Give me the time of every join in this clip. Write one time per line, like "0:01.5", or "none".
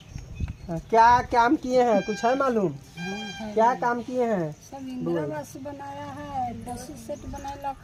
none